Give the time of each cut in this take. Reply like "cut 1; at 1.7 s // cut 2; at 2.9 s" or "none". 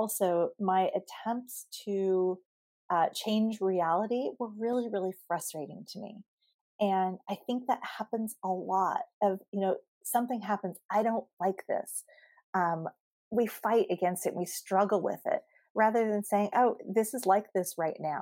none

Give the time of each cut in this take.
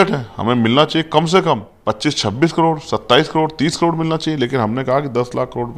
cut 1; at 1.7 s

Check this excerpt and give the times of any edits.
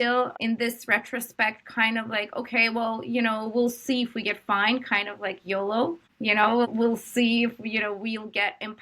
cut 1; at 6.1 s

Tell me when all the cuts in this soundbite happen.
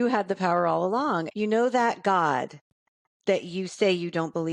cut 1; at 1.3 s

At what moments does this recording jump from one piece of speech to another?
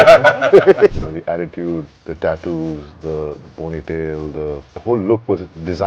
cut 1; at 0.9 s // cut 2; at 2.0 s // cut 3; at 4.7 s

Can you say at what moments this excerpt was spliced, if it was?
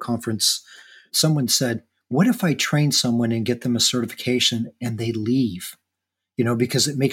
cut 1; at 1.9 s

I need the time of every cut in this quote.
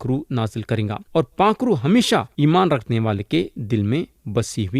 cut 1; at 1.0 s // cut 2; at 2.3 s

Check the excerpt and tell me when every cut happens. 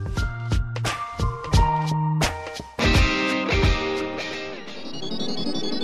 none

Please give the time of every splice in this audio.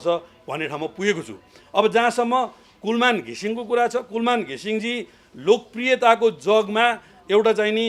none

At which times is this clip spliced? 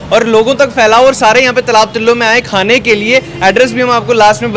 none

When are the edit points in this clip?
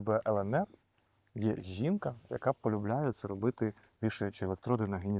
none

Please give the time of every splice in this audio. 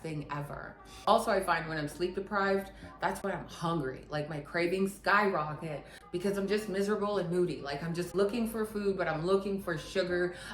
cut 1; at 1.0 s

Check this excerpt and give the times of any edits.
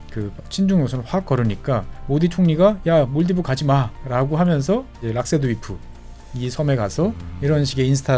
cut 1; at 1.9 s // cut 2; at 4.0 s // cut 3; at 4.9 s // cut 4; at 7.3 s

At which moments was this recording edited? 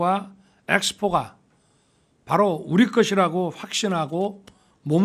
none

